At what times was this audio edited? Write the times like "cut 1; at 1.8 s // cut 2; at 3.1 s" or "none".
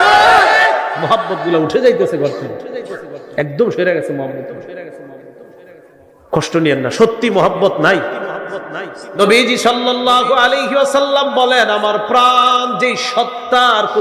cut 1; at 9.0 s